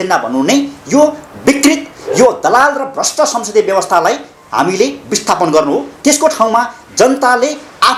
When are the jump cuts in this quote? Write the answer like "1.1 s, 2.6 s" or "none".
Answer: none